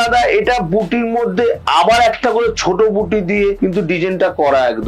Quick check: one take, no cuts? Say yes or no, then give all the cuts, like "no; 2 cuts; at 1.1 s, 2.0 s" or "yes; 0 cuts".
no; 1 cut; at 3.6 s